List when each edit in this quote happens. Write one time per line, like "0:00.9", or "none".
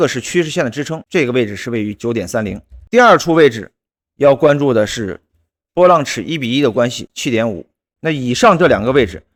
none